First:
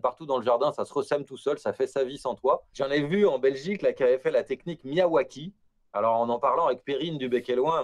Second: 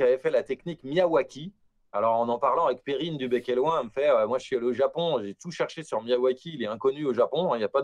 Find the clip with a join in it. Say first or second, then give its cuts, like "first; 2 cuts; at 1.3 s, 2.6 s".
first; 1 cut; at 2.7 s